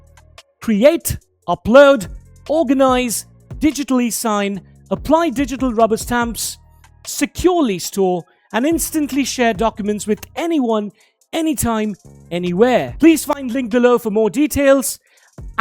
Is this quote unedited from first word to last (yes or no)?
no